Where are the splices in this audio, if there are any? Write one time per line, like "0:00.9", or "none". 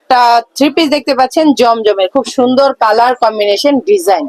none